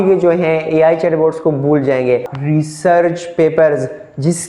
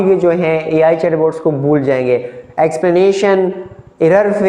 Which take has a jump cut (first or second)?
first